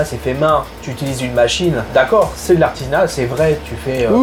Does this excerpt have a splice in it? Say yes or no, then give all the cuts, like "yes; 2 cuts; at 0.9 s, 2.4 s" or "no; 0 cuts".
no; 0 cuts